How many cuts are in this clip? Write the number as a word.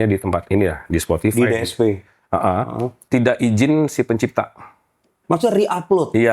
two